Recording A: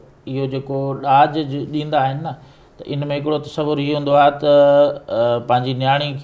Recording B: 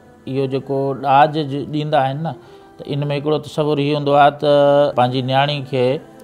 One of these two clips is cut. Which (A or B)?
B